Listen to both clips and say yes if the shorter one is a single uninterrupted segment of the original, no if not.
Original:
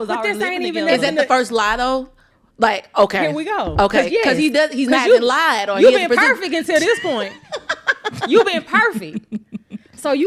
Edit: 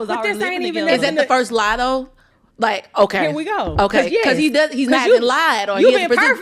yes